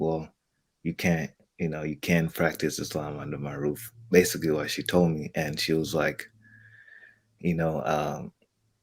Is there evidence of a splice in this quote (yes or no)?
no